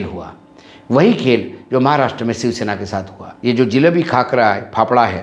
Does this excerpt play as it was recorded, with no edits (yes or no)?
no